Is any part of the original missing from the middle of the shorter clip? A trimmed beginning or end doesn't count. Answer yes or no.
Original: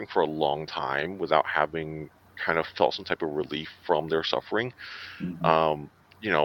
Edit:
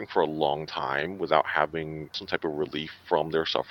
yes